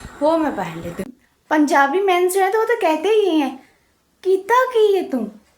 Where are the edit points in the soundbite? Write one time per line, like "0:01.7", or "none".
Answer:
0:01.2